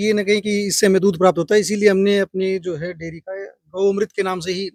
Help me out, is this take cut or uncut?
uncut